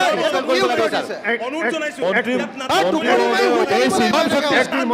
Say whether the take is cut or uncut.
uncut